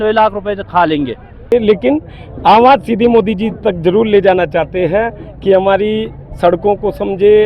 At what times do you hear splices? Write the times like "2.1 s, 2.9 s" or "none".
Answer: 1.5 s